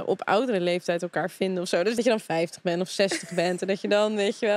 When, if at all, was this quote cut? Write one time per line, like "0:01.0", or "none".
0:01.9

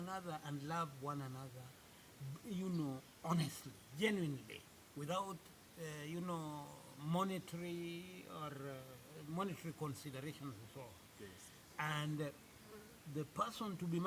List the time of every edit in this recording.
none

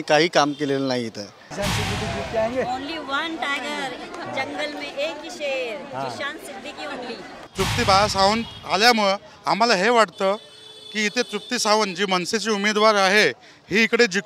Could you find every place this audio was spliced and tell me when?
0:01.4
0:07.4

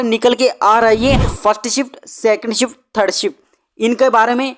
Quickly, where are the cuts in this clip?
0:01.3

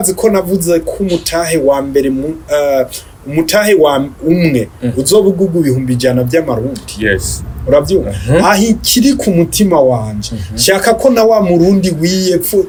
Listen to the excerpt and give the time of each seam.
none

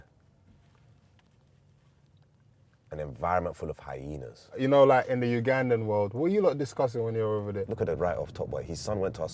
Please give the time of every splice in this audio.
0:04.6
0:07.7

